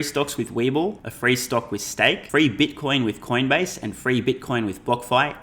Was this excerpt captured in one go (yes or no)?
no